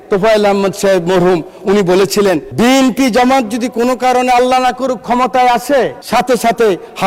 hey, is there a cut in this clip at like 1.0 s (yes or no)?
no